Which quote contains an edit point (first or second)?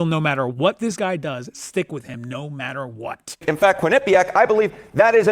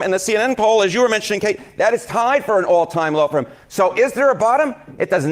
first